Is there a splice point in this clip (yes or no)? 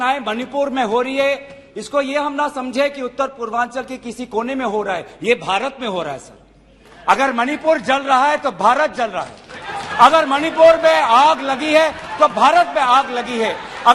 no